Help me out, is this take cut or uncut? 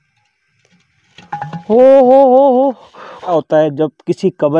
cut